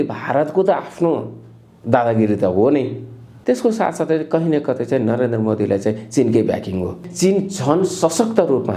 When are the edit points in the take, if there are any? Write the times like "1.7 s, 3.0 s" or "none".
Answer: 3.3 s, 7.0 s

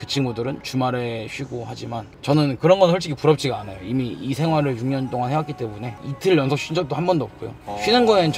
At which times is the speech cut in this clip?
none

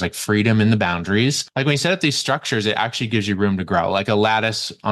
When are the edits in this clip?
1.4 s

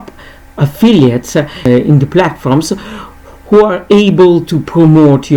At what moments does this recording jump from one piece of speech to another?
1.6 s

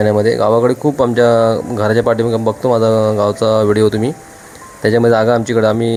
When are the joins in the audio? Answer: none

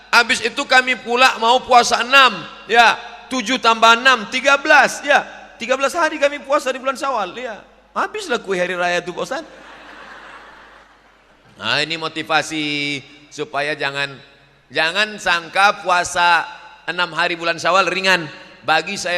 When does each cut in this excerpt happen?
10.8 s

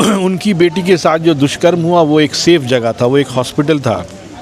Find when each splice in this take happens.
none

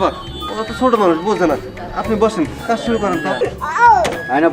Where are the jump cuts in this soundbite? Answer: 3.4 s

